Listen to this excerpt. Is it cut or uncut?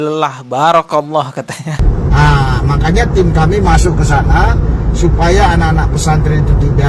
cut